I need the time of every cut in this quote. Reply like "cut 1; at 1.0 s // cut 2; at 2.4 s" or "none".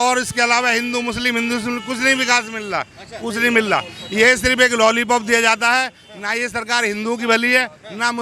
none